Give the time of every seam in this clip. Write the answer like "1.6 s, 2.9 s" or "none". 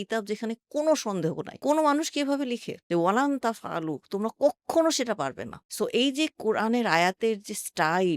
2.8 s